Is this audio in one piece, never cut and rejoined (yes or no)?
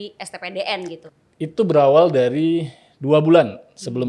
no